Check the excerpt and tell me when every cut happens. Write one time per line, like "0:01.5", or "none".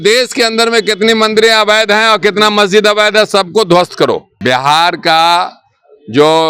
0:04.3